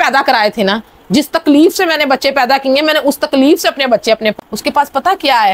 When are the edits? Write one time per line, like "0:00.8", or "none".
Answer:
0:04.3